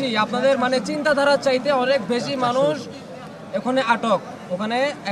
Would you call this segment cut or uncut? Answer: uncut